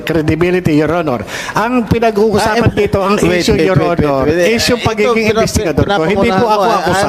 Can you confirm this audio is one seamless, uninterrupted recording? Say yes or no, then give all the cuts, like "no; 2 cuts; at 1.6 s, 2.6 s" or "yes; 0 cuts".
yes; 0 cuts